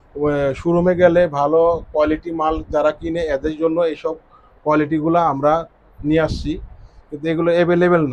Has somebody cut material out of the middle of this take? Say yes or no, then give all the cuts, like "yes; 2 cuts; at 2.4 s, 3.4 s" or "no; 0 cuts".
no; 0 cuts